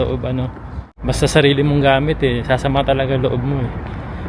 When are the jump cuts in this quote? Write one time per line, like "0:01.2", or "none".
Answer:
0:01.0